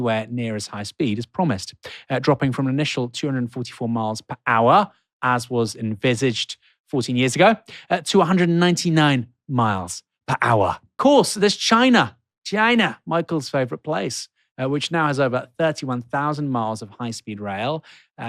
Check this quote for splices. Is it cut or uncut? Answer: cut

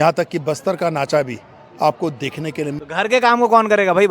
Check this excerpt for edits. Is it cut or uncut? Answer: cut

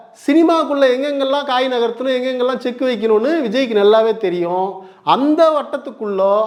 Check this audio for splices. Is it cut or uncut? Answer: uncut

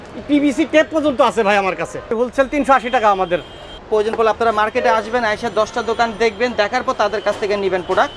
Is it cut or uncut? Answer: cut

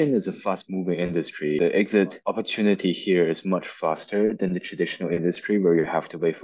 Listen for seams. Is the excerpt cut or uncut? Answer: cut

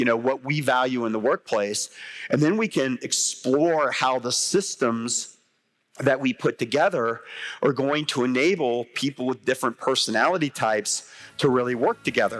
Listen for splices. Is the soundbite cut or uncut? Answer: uncut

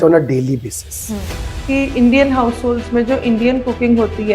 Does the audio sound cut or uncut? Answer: cut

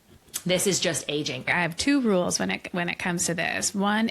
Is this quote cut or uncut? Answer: cut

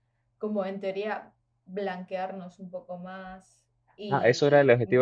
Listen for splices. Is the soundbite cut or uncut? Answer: cut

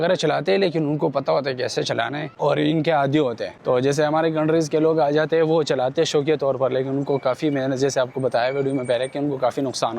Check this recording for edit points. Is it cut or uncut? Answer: uncut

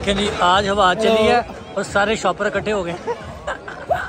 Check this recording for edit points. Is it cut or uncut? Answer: uncut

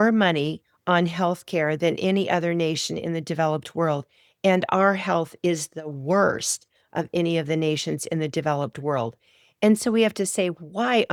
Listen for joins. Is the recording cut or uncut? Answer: uncut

